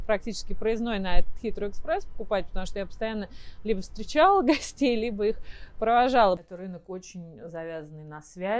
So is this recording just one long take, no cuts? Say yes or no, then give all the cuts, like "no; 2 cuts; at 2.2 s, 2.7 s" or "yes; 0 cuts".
no; 1 cut; at 6.4 s